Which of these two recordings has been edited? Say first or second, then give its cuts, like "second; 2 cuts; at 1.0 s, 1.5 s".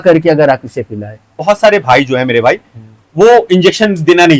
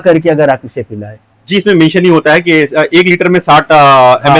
first; 1 cut; at 1.4 s